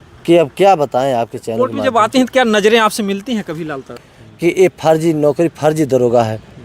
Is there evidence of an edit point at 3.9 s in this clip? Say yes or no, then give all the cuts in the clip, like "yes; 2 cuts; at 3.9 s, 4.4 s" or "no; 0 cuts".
yes; 1 cut; at 3.9 s